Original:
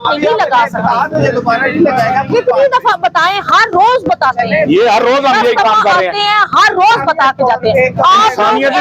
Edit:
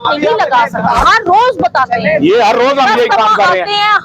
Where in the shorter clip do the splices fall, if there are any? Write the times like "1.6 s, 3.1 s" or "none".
1.0 s